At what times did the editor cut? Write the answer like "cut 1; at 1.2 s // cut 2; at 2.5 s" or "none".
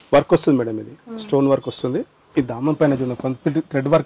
cut 1; at 2.2 s